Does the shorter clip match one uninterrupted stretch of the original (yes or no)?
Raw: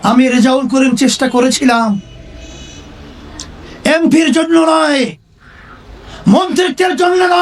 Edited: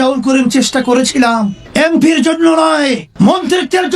no